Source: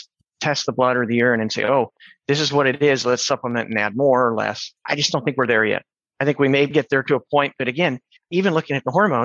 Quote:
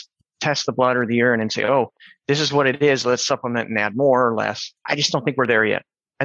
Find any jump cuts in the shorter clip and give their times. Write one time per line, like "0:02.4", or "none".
none